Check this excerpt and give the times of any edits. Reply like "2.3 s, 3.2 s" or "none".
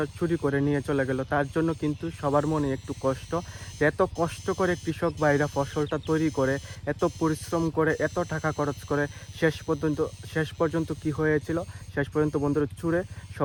none

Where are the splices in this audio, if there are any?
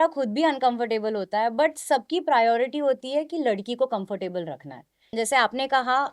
5.1 s

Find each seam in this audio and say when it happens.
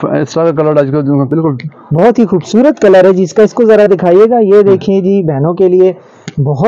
1.3 s

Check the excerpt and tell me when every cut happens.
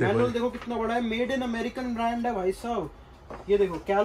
none

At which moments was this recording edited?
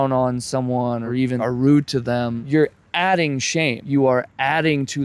2.4 s, 3.8 s

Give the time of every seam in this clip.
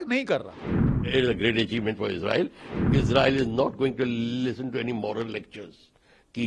1.0 s, 2.7 s

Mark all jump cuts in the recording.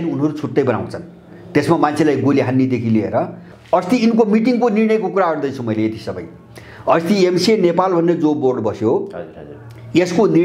3.5 s

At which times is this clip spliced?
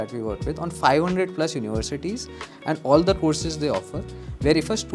none

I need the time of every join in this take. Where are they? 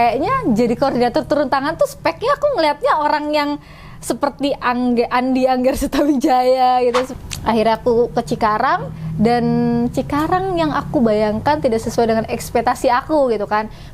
7.1 s

